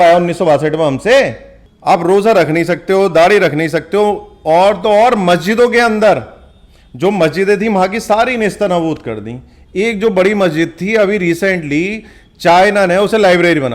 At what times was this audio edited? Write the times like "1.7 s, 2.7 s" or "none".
1.7 s